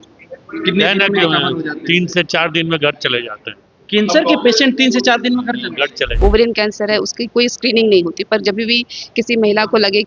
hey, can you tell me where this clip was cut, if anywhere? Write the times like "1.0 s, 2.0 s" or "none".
6.2 s